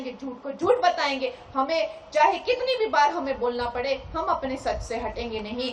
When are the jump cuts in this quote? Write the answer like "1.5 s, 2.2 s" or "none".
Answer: none